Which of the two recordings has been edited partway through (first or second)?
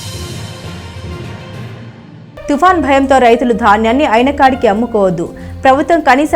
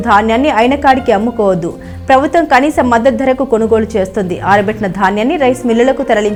first